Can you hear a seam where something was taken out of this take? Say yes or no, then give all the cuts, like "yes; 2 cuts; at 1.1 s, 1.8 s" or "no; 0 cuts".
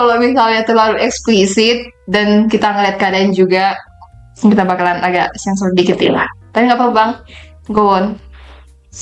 no; 0 cuts